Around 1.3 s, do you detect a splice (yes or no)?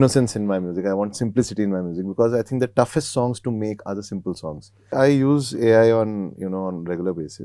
no